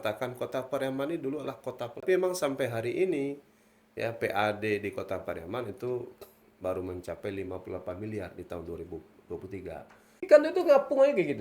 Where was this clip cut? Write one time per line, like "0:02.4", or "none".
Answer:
0:02.0
0:10.2